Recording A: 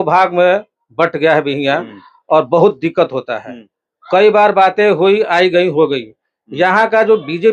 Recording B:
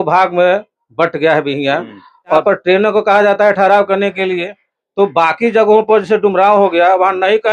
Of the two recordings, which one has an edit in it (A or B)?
B